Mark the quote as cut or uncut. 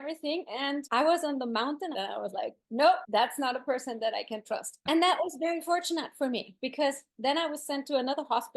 cut